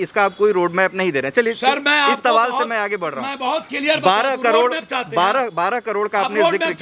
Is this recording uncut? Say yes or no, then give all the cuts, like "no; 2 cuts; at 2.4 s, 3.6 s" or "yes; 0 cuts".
yes; 0 cuts